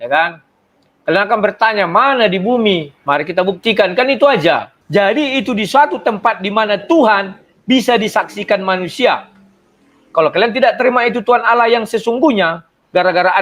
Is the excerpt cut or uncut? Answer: cut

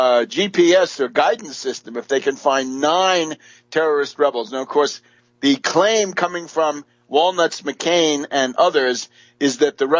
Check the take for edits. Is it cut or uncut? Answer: uncut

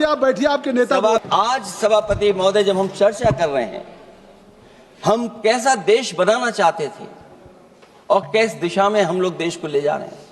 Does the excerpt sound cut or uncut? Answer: cut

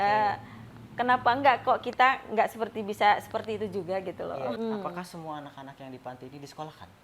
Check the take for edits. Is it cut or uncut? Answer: cut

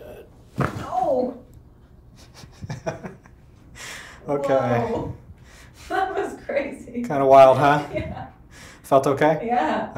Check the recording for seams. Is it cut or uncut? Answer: uncut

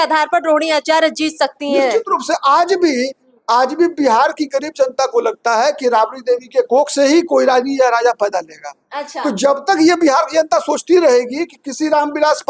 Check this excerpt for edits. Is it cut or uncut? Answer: uncut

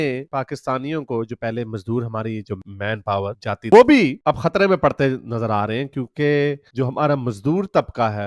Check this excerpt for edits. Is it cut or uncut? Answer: cut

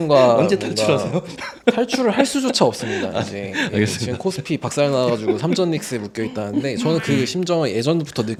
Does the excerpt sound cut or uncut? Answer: uncut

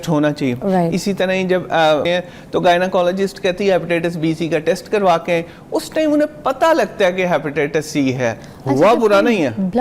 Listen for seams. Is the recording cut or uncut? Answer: cut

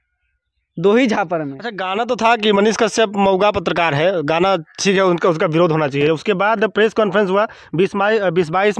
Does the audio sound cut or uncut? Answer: cut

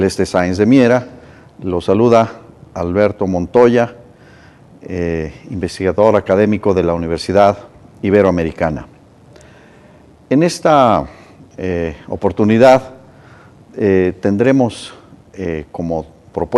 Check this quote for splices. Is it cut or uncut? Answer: uncut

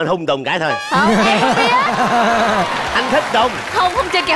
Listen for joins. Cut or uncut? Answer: uncut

